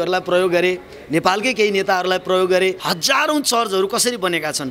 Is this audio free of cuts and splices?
no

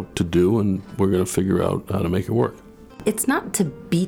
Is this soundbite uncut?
no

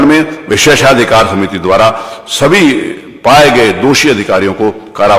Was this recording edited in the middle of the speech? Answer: no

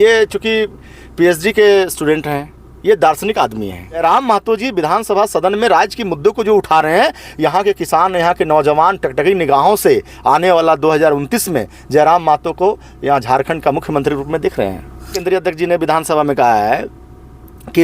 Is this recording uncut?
no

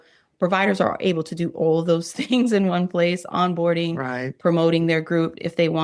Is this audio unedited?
yes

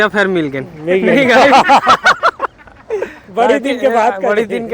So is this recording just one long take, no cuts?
yes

